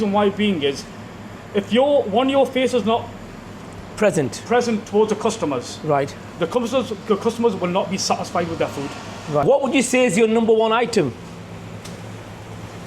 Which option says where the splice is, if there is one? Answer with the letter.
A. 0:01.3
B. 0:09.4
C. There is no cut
B